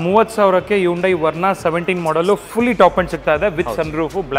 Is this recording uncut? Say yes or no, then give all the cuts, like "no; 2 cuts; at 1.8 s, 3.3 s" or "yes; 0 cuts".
yes; 0 cuts